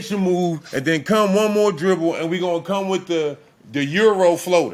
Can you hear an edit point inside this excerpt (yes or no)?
no